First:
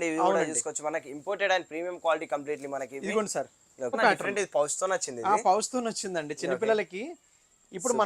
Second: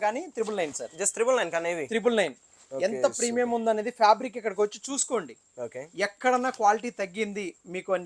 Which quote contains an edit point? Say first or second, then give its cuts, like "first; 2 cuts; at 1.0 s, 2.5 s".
first; 1 cut; at 4.0 s